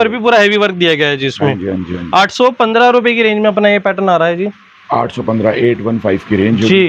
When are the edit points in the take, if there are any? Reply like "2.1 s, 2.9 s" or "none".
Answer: none

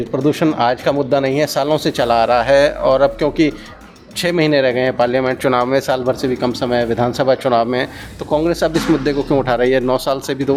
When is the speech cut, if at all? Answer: none

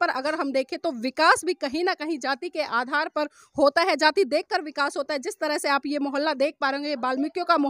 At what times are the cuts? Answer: none

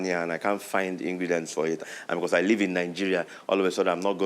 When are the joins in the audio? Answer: 1.8 s

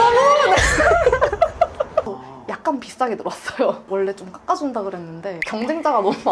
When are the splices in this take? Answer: 2.1 s

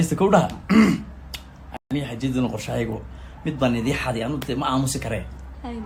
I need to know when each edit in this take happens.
none

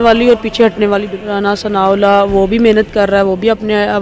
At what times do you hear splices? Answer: 1.1 s

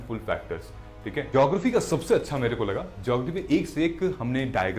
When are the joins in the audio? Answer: 1.3 s

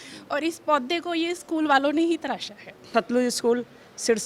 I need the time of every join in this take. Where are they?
2.9 s

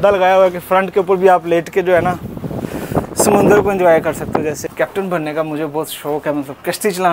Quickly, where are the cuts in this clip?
4.6 s

